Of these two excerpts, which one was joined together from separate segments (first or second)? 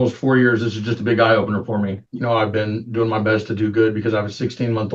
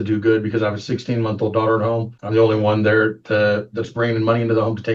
first